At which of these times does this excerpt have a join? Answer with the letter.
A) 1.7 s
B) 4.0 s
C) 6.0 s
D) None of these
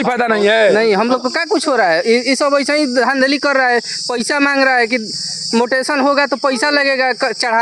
D